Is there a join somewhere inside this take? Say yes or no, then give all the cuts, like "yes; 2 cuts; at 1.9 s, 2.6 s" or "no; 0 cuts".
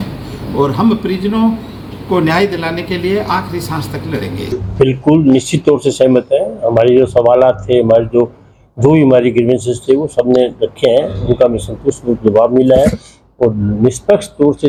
no; 0 cuts